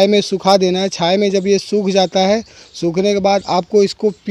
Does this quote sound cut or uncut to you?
uncut